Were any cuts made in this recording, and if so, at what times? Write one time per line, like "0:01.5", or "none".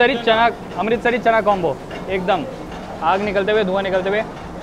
none